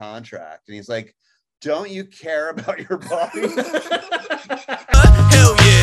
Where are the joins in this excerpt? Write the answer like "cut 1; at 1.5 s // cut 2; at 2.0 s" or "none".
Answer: cut 1; at 4.8 s